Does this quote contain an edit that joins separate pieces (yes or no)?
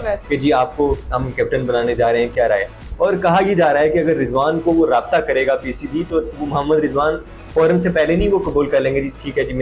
no